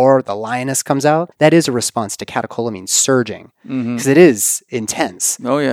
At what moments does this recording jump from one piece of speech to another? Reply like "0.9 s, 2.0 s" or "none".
1.3 s